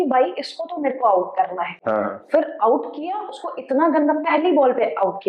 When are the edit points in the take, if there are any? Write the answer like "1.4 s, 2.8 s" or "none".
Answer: none